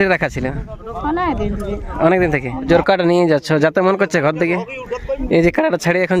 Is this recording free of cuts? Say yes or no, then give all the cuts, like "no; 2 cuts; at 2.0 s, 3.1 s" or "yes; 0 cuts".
no; 1 cut; at 2.7 s